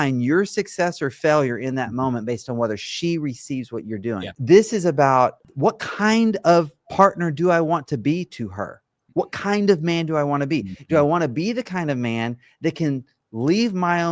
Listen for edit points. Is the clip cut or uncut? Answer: cut